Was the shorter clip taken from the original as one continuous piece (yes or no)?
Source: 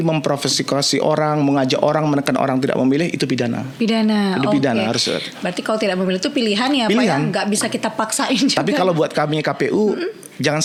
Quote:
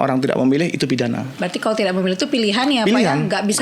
no